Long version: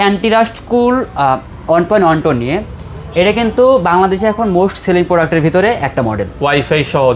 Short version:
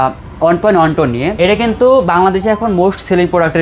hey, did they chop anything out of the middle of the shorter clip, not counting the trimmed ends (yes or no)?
yes